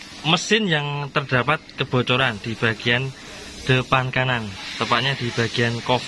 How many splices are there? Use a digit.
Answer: 0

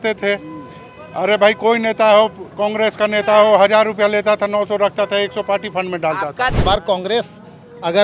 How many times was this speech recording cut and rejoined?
1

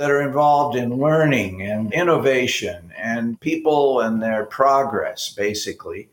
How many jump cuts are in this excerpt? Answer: 1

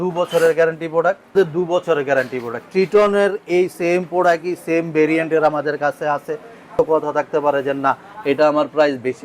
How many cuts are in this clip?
2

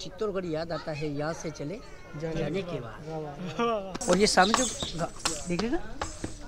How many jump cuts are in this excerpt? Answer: 1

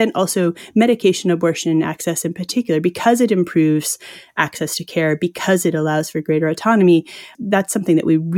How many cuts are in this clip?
1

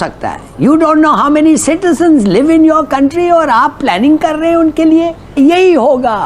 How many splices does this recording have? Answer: 1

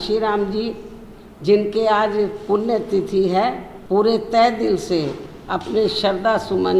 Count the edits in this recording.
1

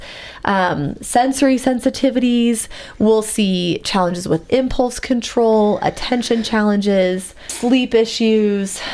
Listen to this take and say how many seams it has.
1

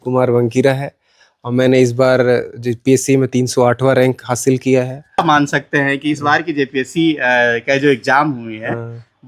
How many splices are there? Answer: 1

